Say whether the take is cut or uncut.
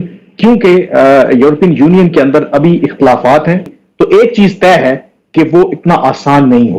cut